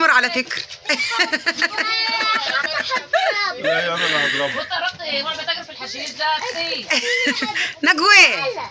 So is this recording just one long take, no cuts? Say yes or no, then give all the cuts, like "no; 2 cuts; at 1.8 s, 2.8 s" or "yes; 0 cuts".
yes; 0 cuts